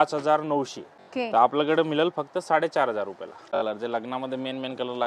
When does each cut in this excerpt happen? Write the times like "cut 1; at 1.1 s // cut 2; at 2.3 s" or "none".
cut 1; at 0.9 s // cut 2; at 3.6 s